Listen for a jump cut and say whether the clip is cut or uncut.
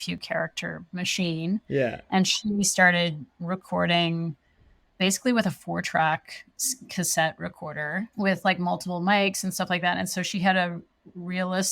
uncut